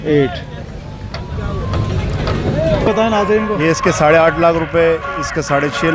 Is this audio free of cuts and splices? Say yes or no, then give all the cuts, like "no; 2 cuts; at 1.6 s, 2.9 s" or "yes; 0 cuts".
no; 1 cut; at 2.9 s